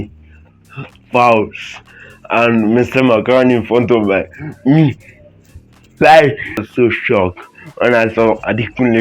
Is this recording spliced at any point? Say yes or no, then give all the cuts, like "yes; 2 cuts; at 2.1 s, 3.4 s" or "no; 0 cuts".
yes; 1 cut; at 6.6 s